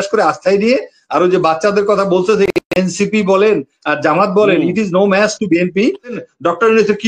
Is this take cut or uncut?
cut